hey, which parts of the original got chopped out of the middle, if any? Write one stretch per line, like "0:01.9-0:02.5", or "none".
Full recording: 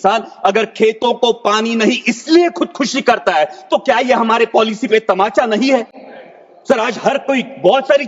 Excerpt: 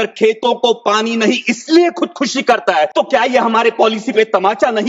0:03.5-0:03.7